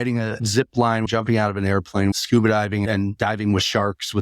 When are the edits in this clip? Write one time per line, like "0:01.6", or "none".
0:01.1
0:02.2